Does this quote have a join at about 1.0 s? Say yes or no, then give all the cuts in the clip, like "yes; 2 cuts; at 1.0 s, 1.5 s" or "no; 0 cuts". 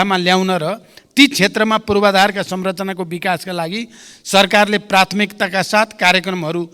no; 0 cuts